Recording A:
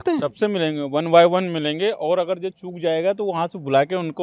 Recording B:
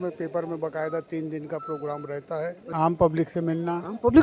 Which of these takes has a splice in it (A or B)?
B